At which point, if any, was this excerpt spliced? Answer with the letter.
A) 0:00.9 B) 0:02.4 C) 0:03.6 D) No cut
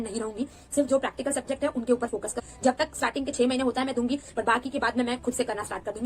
B